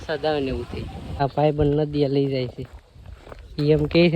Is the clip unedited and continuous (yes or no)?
no